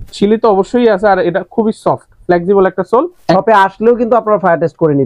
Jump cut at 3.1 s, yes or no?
yes